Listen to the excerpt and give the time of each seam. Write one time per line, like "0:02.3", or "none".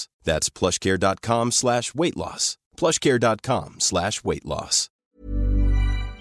0:05.1